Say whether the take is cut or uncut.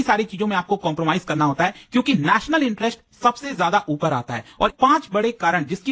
cut